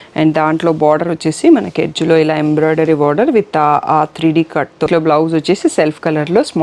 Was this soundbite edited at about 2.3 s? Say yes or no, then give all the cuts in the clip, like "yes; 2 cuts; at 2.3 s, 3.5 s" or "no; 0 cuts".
no; 1 cut; at 4.9 s